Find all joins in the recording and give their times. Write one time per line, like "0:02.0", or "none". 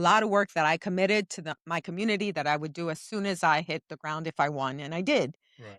none